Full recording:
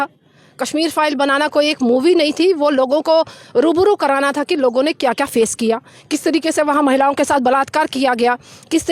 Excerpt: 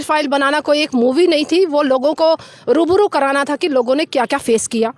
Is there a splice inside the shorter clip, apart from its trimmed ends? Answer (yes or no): no